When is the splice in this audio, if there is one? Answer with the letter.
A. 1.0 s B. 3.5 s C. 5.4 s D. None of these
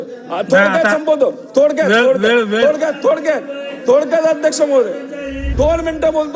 C